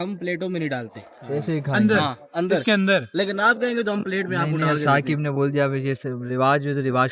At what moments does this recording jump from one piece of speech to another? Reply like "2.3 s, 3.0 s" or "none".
none